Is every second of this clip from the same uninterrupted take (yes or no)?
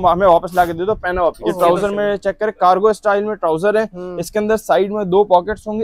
no